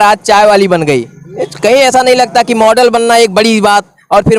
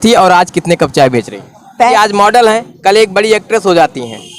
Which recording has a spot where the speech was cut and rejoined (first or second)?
second